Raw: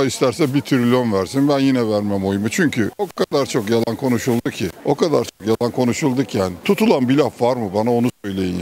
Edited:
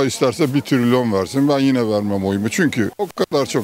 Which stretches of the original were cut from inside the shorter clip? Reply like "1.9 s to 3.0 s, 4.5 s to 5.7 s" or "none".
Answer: none

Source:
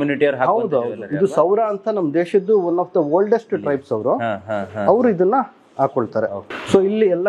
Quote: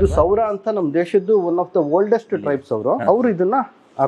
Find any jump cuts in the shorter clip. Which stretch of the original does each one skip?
4.2 s to 4.8 s

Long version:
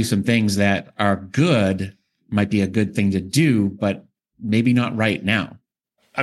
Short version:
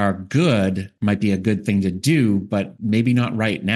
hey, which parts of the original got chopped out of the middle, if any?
1.9 s to 2.2 s, 4.0 s to 4.3 s

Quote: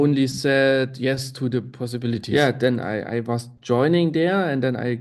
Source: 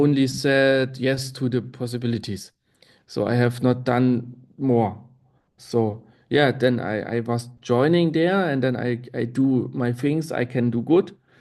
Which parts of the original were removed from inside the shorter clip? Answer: 2.2 s to 6.2 s

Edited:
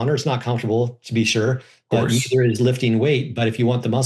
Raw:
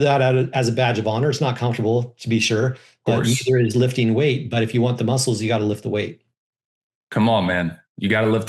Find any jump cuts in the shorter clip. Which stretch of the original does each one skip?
none

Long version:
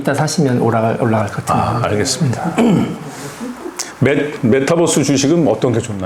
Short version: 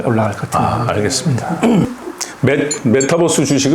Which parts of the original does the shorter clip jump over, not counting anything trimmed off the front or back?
2.8 s to 3.5 s

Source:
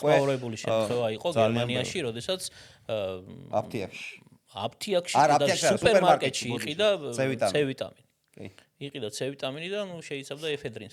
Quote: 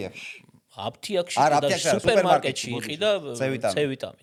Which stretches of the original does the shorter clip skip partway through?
none

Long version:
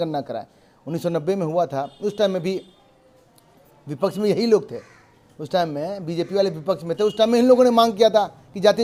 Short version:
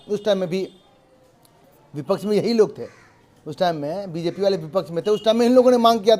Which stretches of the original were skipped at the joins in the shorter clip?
none

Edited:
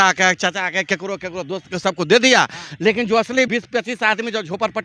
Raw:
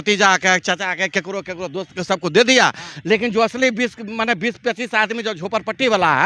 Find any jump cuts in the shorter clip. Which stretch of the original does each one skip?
3.7 s to 4.4 s

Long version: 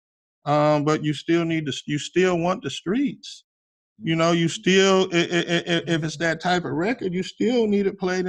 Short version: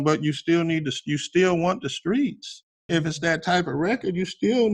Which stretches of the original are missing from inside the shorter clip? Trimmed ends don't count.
3.7 s to 5.8 s

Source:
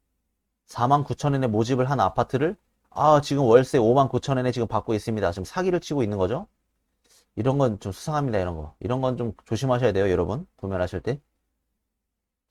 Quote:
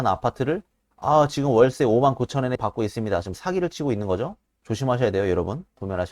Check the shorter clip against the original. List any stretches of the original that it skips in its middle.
4.5 s to 4.7 s, 6.7 s to 9.4 s

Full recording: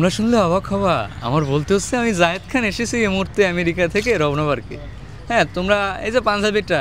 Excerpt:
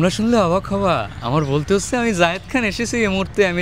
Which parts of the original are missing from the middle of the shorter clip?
none

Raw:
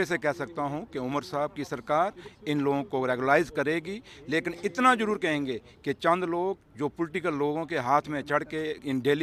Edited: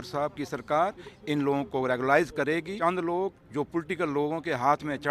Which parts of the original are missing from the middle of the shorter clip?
3.9 s to 6.0 s

